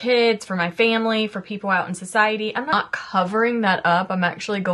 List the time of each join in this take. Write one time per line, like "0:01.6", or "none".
0:02.7